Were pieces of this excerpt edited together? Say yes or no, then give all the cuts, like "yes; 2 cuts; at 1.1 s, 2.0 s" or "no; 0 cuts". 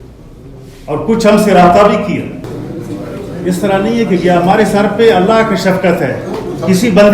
yes; 1 cut; at 2.5 s